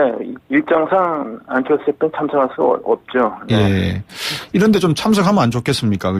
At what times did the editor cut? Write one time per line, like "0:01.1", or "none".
none